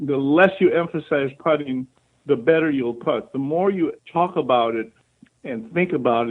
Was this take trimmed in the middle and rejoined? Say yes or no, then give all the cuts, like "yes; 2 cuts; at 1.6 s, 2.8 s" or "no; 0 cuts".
yes; 1 cut; at 4.0 s